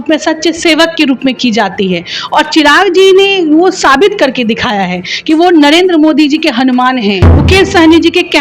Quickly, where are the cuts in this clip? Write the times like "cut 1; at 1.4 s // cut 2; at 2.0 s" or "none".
cut 1; at 7.3 s